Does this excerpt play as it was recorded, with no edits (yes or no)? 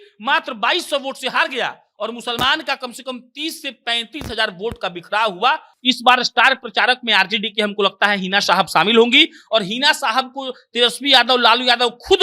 no